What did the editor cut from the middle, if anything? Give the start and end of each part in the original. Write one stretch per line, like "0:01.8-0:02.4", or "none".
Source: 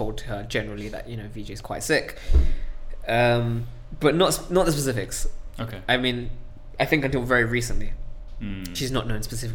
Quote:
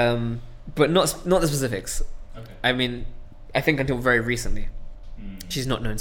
none

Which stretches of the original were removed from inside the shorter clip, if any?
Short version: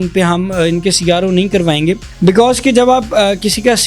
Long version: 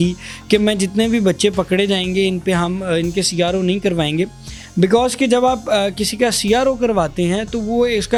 0:04.4-0:04.6

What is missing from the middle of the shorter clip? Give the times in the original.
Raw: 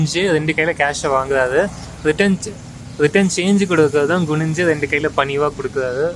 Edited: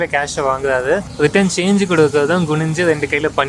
0:01.8-0:02.9

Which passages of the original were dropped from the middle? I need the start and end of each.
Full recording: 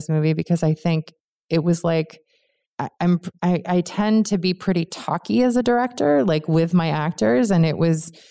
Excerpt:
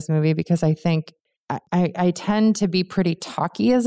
0:01.5-0:03.2

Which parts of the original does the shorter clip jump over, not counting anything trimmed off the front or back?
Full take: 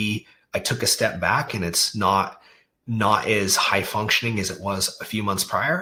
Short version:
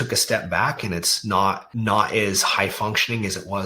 0:02.4-0:02.8

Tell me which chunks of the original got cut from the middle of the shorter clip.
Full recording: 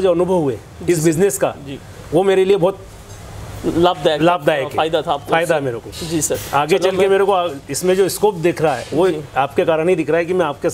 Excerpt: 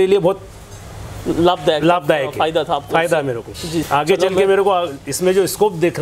0:06.2-0:06.5

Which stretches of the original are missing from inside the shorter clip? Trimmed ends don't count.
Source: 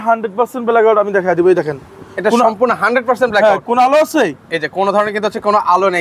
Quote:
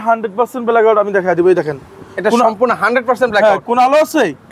none

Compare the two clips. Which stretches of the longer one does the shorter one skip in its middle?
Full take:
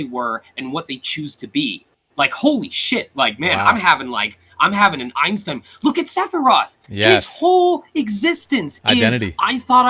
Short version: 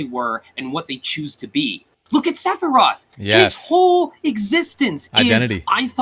0:01.9-0:05.6

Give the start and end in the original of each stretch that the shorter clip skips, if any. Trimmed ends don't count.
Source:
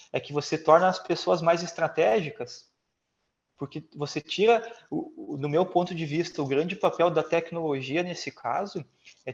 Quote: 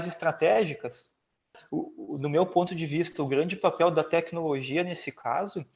0:03.1-0:04.8

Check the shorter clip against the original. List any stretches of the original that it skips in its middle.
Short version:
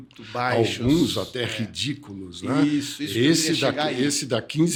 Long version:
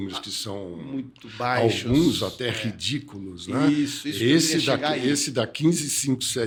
none

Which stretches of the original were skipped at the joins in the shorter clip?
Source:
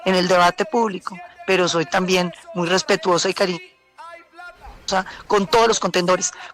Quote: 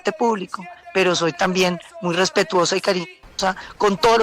0:03.7-0:04.7

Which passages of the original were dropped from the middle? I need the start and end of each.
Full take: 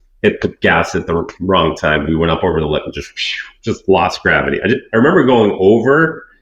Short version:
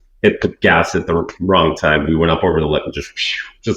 none

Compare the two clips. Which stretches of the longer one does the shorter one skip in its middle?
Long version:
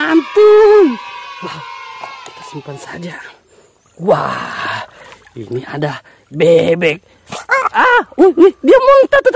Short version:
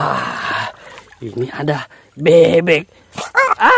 none

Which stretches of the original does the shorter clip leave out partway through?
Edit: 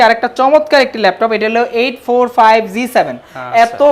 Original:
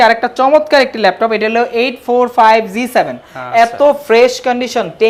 none

